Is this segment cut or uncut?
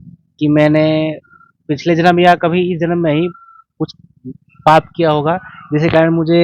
uncut